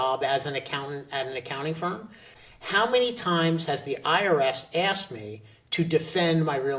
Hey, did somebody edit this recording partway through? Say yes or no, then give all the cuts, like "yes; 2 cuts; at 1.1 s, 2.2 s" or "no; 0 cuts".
yes; 1 cut; at 2.3 s